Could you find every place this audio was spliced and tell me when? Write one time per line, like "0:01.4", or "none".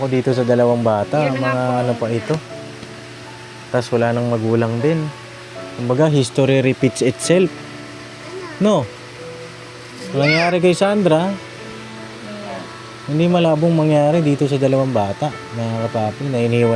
none